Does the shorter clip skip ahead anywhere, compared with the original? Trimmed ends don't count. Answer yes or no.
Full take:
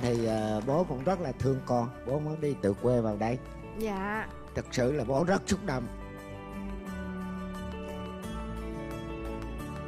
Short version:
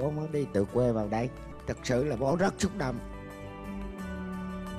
yes